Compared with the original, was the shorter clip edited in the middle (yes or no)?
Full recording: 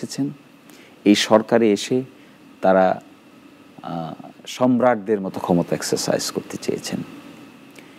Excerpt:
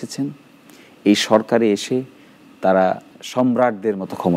yes